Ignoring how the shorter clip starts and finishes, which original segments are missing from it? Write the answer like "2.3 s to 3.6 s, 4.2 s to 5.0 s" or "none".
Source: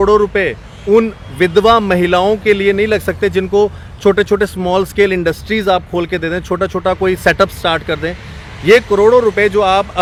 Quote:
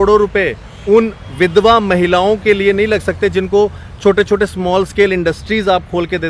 none

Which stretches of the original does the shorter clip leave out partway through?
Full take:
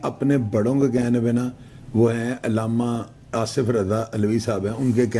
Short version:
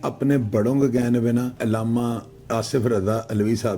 1.5 s to 2.4 s

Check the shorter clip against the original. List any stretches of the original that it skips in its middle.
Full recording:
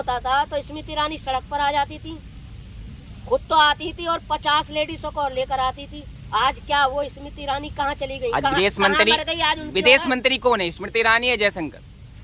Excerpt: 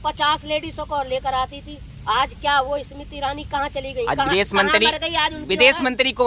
none

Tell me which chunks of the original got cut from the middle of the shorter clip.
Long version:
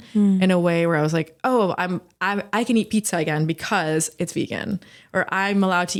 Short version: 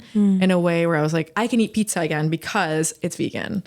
1.3 s to 2.5 s

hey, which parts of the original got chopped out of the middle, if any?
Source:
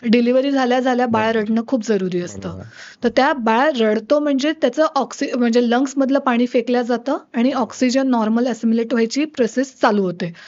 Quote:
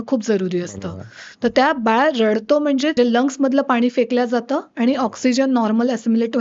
4.6 s to 5.5 s

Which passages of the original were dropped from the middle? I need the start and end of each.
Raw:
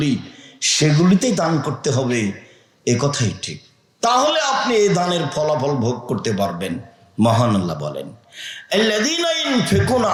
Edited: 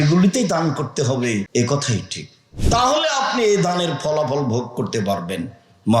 2.4 s to 2.8 s

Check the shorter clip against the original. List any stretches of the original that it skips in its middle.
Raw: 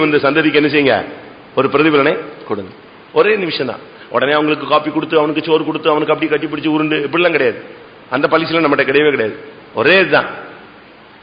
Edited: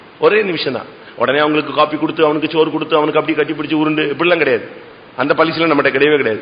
none

